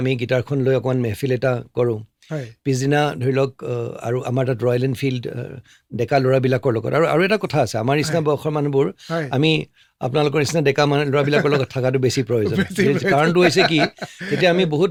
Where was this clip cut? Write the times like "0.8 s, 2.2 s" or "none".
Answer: none